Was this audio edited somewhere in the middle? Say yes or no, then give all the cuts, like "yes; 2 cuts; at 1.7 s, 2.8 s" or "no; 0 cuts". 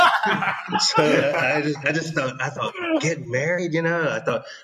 no; 0 cuts